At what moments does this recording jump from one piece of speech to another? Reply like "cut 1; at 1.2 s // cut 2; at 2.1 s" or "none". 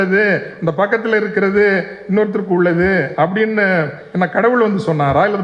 none